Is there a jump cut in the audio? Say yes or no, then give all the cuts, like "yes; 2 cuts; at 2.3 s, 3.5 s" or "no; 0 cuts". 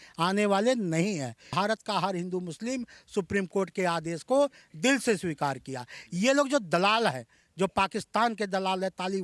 yes; 1 cut; at 1.5 s